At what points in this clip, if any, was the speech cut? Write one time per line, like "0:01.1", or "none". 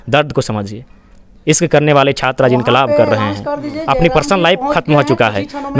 none